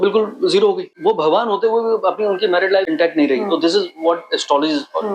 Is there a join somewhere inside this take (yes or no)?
yes